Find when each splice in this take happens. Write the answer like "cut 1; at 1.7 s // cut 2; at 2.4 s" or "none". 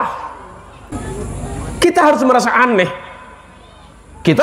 cut 1; at 0.9 s